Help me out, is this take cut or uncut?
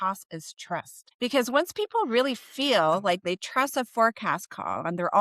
cut